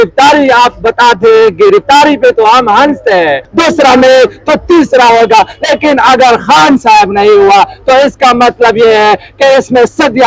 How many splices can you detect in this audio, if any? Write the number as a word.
one